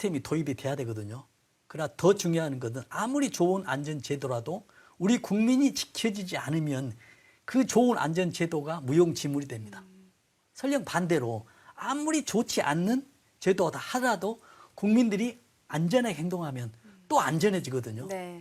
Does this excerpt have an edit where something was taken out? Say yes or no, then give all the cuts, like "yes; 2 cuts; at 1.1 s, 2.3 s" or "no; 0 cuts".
no; 0 cuts